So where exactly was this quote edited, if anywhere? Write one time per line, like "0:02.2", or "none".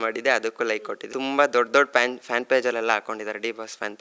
0:01.0